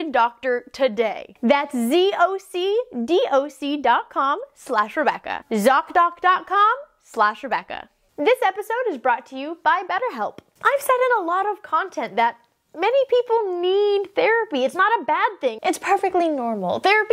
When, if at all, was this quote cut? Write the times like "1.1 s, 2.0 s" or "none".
10.5 s, 15.6 s